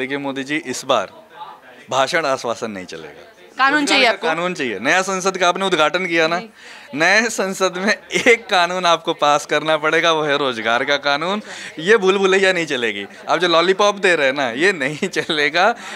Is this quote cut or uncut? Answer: uncut